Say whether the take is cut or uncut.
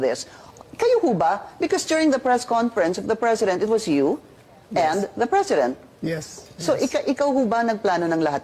uncut